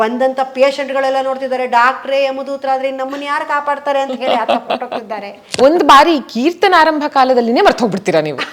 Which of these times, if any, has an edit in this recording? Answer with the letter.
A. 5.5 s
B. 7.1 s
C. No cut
A